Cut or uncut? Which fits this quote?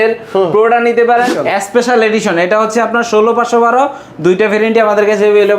cut